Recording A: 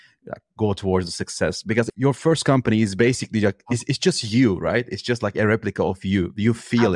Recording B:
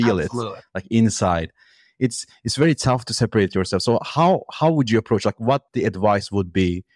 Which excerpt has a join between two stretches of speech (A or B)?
A